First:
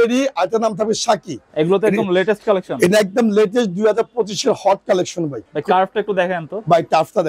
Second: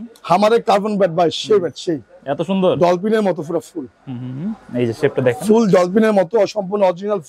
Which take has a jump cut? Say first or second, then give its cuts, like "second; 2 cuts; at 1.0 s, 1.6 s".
first; 2 cuts; at 1.5 s, 5.4 s